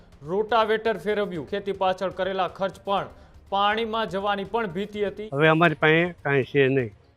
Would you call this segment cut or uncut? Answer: cut